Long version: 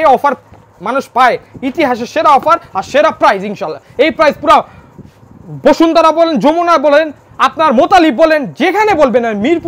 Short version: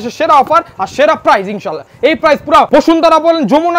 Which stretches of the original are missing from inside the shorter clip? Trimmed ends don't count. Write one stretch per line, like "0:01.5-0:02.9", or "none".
0:04.6-0:05.6

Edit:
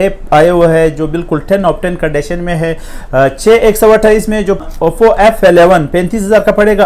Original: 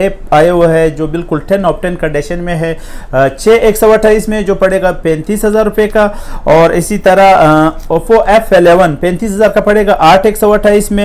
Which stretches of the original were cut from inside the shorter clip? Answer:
0:04.6-0:07.7

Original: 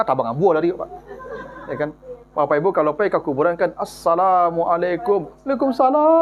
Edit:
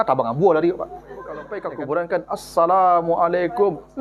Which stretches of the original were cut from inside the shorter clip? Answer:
0:01.8-0:03.2

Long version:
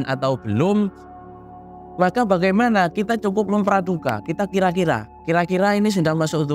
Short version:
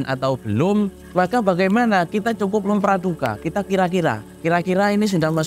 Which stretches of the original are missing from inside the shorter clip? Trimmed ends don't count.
0:01.0-0:01.8

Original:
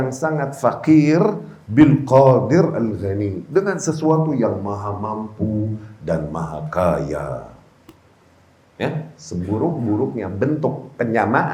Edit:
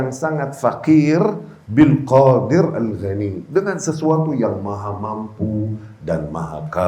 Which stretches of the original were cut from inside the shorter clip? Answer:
none

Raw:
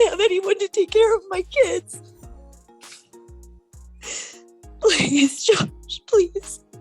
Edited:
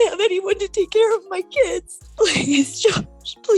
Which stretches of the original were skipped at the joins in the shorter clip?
0:02.0-0:04.6

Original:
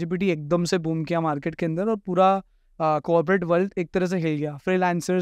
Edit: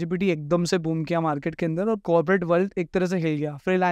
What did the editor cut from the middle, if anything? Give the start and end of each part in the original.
0:02.0-0:03.0

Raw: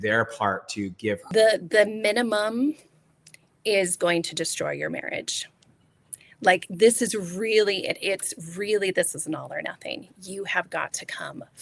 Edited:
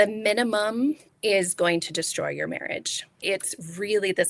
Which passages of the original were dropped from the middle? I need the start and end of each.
0:02.9-0:03.5
0:05.6-0:08.0

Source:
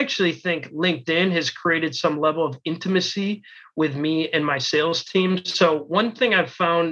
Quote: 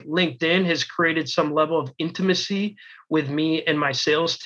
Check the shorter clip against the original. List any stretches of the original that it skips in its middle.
none

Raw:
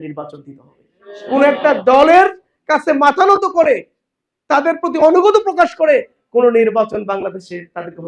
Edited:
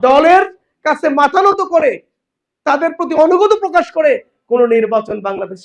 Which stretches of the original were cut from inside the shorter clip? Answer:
none

